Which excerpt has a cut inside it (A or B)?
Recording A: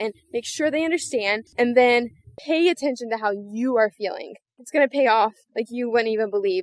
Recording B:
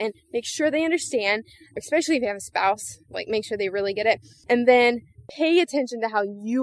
A